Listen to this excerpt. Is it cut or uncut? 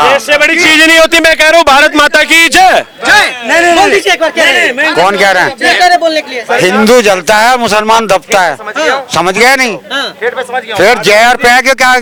uncut